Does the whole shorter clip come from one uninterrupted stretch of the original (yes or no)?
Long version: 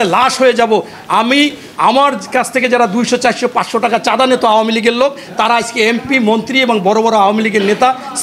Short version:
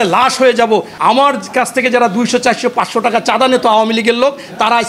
no